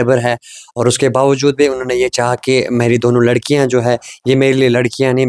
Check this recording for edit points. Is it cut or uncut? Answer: uncut